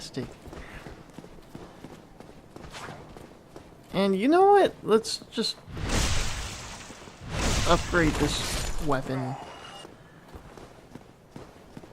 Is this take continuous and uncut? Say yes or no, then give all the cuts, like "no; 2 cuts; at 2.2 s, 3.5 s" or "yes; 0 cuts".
no; 1 cut; at 2.6 s